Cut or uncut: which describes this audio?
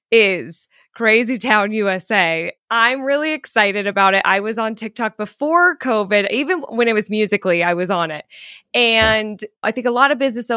cut